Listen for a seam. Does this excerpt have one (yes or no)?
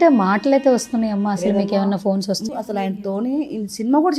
no